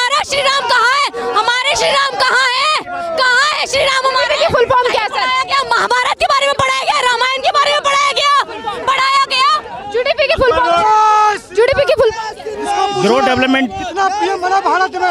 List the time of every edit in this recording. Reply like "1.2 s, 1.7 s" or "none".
none

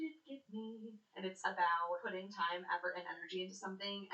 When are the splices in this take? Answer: 1.2 s, 2.0 s

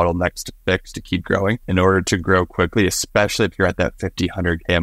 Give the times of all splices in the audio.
1.6 s

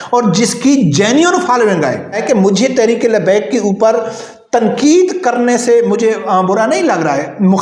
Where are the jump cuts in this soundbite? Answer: 2.2 s

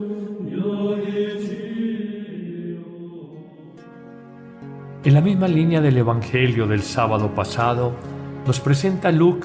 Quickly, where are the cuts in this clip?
6.8 s

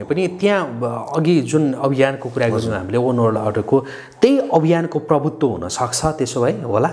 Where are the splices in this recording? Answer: none

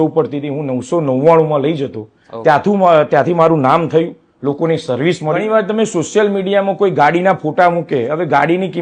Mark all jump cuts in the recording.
5.4 s

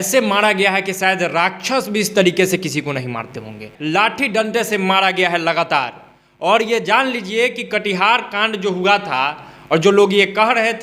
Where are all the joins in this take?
none

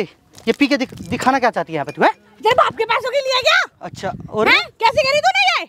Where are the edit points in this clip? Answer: none

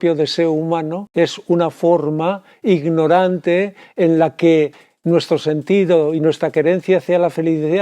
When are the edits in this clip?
1.0 s

